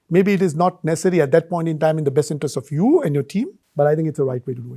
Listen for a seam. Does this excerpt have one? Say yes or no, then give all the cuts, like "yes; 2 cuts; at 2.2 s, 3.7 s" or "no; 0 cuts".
yes; 1 cut; at 3.6 s